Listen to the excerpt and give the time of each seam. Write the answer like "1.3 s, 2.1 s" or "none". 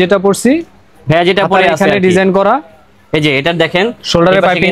none